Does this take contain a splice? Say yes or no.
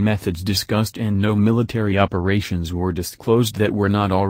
no